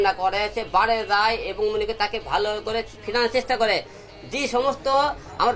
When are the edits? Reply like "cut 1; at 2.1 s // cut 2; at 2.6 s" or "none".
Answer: cut 1; at 1.5 s